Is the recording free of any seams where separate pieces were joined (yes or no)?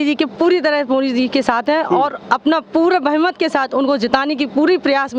yes